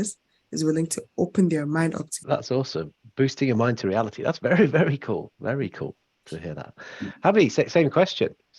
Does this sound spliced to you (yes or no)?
yes